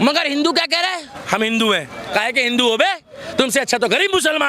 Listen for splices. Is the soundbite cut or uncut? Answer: cut